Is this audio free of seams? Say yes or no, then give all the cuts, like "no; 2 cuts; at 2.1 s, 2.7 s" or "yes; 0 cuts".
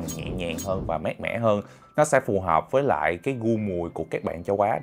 yes; 0 cuts